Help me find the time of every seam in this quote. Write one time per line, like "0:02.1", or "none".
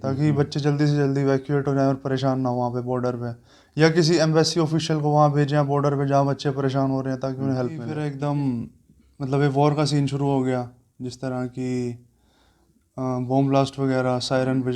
0:07.9